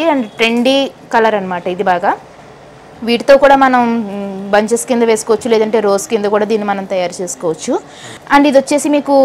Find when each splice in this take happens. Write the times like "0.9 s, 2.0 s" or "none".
none